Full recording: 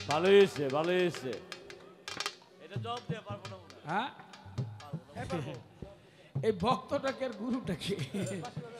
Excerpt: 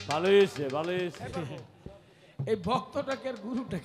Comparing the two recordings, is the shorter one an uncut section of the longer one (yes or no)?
no